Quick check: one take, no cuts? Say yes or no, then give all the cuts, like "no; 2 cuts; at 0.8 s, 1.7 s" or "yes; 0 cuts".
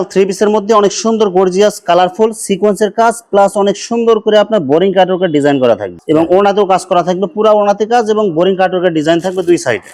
yes; 0 cuts